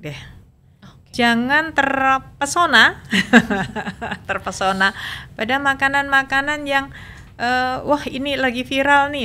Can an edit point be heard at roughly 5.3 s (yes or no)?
no